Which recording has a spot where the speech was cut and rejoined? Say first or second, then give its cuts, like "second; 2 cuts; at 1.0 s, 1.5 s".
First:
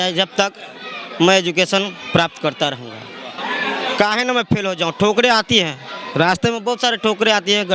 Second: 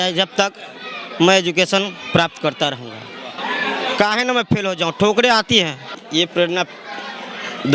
second; 1 cut; at 6.0 s